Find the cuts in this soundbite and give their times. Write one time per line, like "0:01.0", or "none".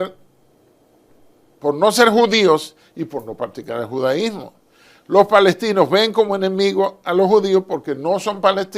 none